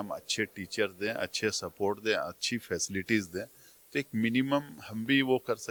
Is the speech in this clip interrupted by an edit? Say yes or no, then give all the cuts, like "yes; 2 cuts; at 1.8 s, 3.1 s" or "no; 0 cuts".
no; 0 cuts